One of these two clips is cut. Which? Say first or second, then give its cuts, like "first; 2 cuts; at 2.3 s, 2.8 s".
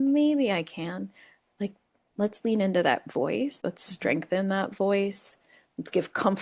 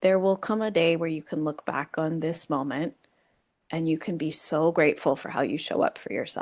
first; 1 cut; at 3.6 s